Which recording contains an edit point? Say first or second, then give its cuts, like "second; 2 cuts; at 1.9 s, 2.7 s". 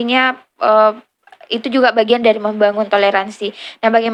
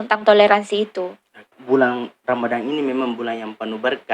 second; 1 cut; at 1.6 s